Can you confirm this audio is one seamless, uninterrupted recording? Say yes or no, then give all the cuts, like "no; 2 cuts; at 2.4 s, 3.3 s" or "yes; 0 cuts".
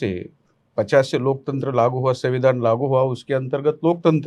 yes; 0 cuts